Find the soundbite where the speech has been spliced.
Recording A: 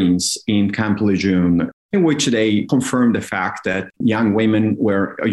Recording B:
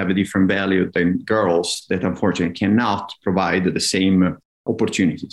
A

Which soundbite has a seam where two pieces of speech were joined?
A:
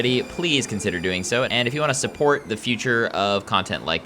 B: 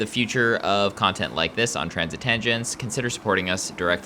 A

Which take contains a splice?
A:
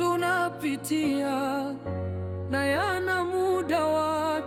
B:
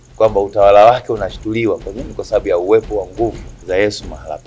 B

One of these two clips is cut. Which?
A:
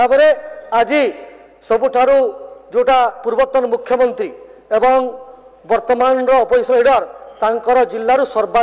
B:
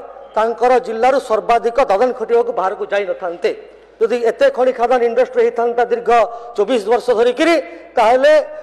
B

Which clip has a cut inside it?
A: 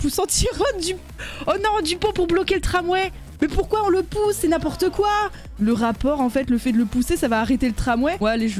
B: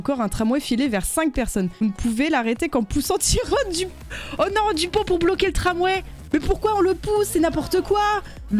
B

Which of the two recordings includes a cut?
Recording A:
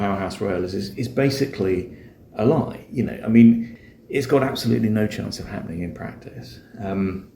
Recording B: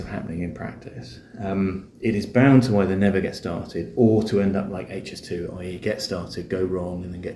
A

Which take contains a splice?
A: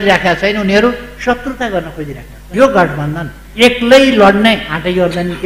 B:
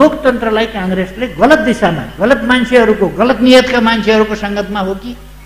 A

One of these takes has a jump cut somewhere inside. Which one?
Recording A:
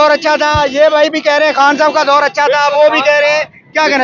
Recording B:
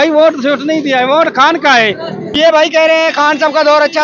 B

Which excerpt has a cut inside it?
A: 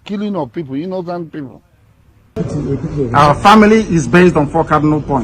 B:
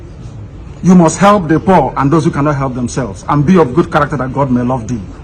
A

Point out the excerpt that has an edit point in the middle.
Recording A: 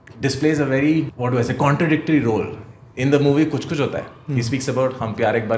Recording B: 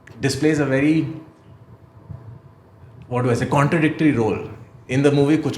A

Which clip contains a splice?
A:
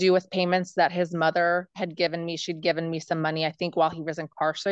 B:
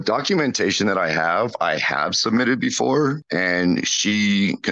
B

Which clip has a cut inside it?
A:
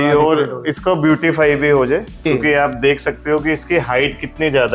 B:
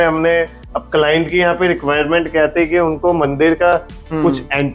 A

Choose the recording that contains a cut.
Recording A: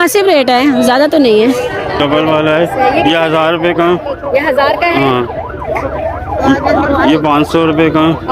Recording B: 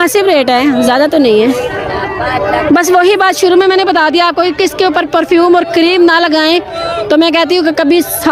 A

